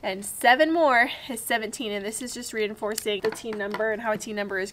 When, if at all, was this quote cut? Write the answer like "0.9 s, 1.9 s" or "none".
3.2 s